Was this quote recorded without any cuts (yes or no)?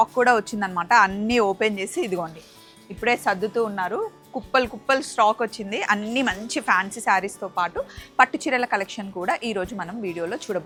yes